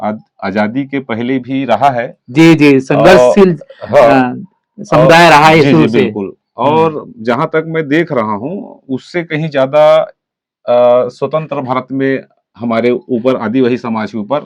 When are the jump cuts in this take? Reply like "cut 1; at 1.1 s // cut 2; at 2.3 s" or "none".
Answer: none